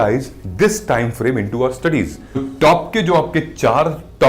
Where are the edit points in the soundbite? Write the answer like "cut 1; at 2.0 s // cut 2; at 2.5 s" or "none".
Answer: cut 1; at 2.4 s